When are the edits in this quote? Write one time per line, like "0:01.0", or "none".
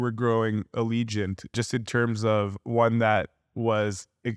0:01.5